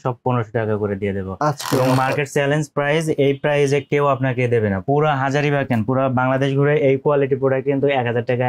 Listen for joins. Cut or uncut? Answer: cut